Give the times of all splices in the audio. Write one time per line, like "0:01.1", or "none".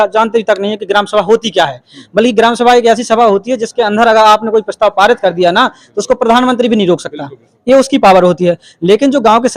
none